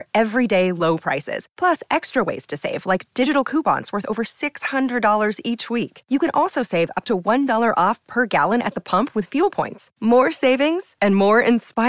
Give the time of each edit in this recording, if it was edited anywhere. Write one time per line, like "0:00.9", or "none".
none